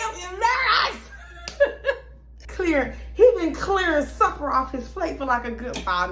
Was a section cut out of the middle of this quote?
yes; 1 cut; at 2.4 s

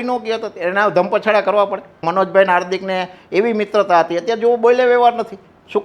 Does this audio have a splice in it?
yes; 1 cut; at 2.0 s

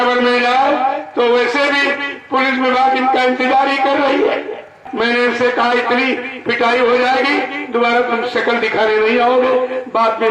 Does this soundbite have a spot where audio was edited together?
yes; 1 cut; at 4.9 s

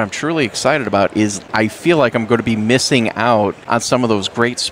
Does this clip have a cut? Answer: yes; 2 cuts; at 1.4 s, 3.6 s

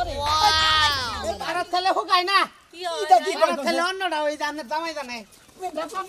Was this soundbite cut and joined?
yes; 1 cut; at 1.3 s

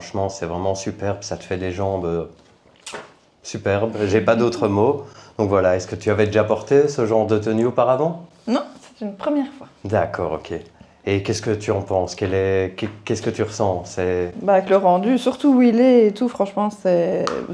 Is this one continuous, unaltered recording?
yes; 0 cuts

